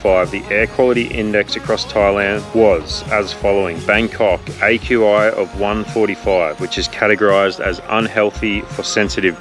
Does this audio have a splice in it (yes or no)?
no